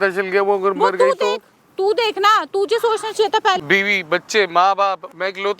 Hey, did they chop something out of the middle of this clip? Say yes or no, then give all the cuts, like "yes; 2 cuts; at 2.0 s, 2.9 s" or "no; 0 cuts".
yes; 1 cut; at 3.6 s